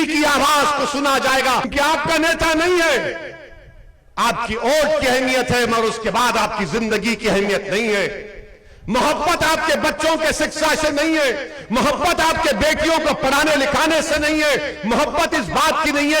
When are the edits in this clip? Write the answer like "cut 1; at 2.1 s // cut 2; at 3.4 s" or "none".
cut 1; at 1.7 s